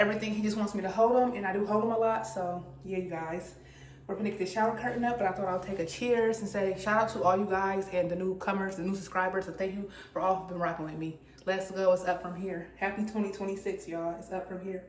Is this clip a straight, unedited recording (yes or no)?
yes